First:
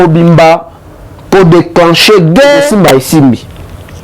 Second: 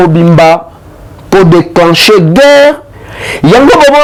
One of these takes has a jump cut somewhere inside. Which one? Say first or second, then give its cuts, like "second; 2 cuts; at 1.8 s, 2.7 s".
first; 1 cut; at 2.7 s